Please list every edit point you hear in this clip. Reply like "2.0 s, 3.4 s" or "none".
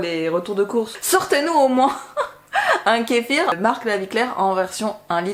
1.0 s, 3.5 s